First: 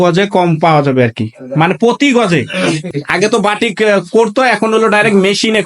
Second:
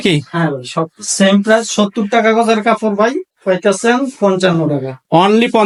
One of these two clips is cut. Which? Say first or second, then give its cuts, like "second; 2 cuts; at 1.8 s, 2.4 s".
first; 1 cut; at 2.9 s